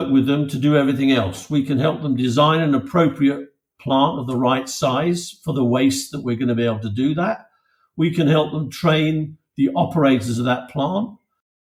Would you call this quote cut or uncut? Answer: uncut